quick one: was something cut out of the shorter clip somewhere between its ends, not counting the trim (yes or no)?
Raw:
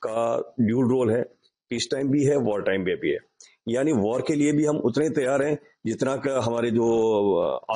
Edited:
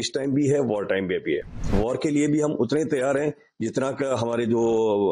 yes